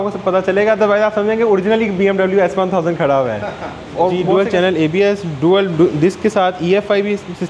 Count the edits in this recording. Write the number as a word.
one